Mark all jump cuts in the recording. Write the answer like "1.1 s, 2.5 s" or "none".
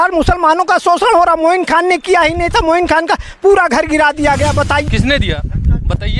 4.9 s